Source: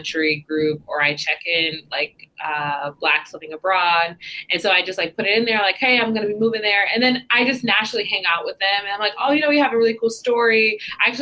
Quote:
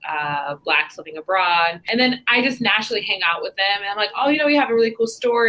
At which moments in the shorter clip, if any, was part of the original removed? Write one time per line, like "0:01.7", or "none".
0:01.8